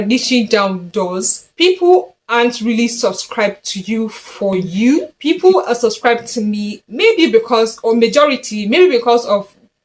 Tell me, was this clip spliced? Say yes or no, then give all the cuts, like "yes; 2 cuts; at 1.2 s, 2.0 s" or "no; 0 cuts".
yes; 1 cut; at 5.1 s